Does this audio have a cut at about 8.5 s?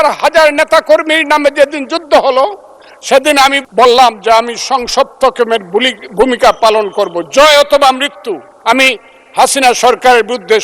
yes; 2 cuts; at 3.6 s, 8.5 s

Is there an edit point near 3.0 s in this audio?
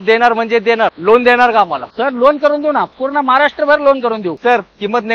no; 2 cuts; at 1.0 s, 4.4 s

